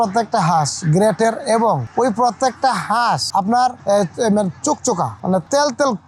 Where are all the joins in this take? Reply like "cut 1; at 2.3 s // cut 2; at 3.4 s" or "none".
none

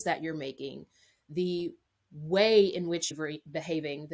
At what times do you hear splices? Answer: cut 1; at 3.1 s

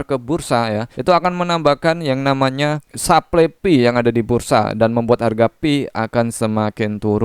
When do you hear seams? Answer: cut 1; at 0.9 s // cut 2; at 2.9 s

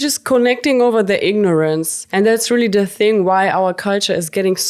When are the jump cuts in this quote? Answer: cut 1; at 2.0 s

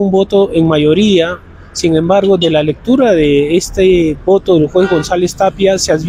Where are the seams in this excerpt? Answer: none

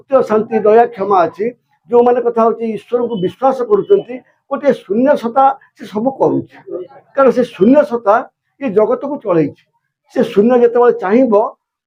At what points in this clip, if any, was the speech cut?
none

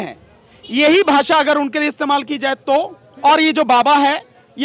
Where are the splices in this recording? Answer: cut 1; at 3.0 s

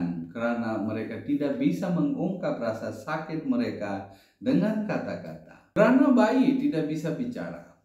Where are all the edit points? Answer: cut 1; at 5.8 s

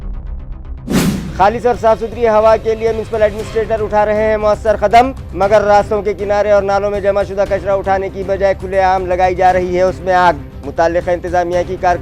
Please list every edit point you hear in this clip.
cut 1; at 0.9 s

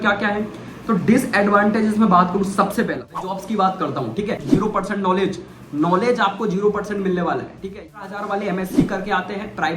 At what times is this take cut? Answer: cut 1; at 3.4 s // cut 2; at 4.4 s // cut 3; at 7.9 s

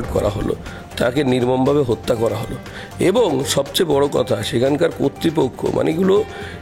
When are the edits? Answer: none

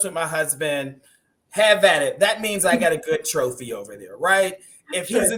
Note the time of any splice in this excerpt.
none

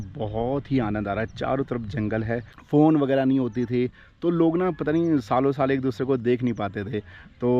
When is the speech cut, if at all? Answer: cut 1; at 2.5 s

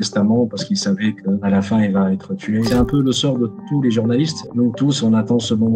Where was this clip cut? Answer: cut 1; at 1.4 s // cut 2; at 2.7 s

